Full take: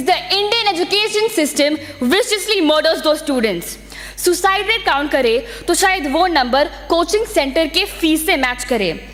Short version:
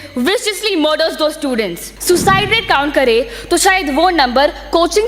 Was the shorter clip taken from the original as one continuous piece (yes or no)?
no